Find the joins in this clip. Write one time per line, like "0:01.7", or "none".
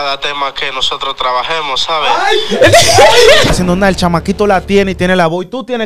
0:03.5